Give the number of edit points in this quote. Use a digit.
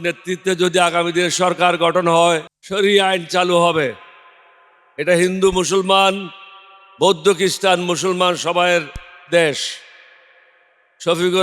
1